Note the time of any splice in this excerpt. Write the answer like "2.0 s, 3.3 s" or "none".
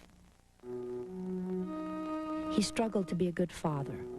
3.1 s